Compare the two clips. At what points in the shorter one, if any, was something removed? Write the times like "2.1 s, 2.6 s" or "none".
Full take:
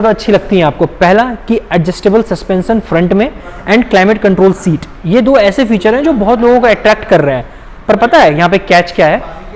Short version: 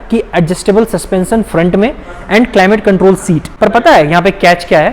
3.4 s

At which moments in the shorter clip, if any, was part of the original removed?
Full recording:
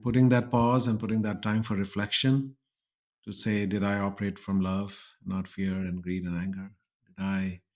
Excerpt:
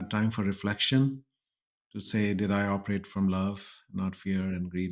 none

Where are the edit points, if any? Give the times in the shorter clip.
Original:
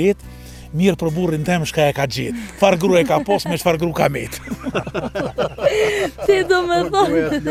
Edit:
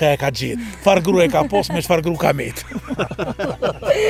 none

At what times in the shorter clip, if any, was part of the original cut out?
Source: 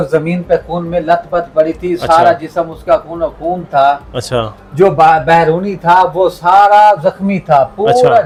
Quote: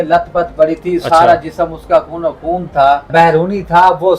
3.1 s

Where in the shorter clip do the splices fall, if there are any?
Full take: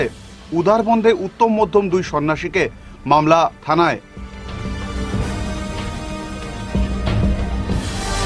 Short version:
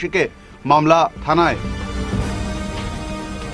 1.6 s

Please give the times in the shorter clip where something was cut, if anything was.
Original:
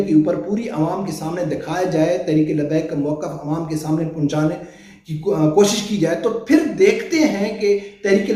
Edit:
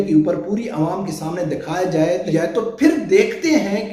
2.3 s

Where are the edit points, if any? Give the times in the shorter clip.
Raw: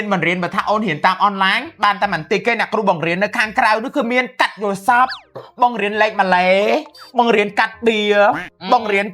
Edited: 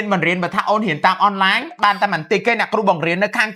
none

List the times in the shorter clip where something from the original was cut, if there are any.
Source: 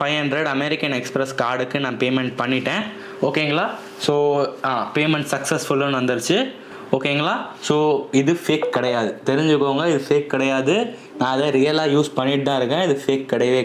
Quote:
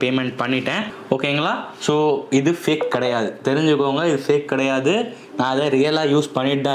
0.9 s

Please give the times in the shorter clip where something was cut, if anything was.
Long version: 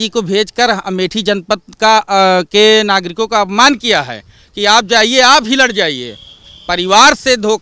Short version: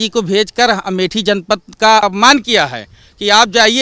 2.0 s

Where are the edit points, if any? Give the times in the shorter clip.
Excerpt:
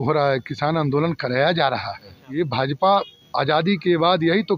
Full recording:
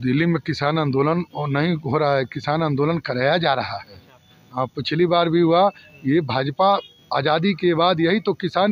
2.2 s

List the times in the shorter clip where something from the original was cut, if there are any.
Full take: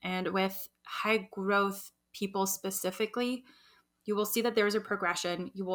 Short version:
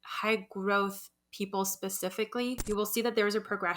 2.6 s

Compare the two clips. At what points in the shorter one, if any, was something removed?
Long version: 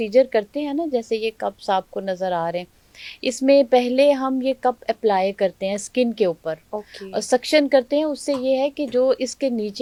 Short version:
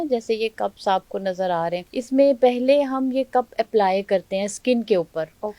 1.9 s

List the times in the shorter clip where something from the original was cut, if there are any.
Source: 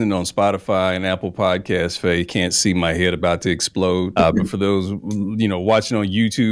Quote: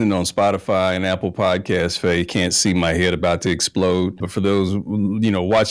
4.2 s

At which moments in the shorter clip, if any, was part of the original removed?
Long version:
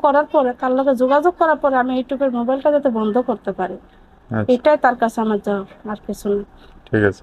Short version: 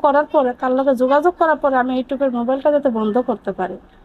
none

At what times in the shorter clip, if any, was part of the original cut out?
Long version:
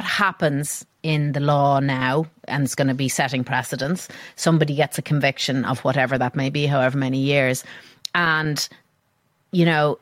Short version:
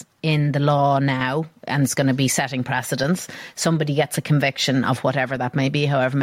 none

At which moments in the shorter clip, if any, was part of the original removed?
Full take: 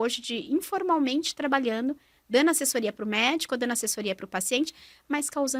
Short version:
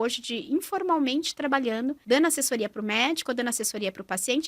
2.0 s

